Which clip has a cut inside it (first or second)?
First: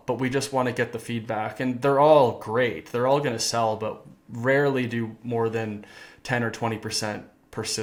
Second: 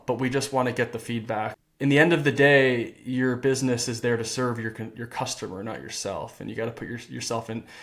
second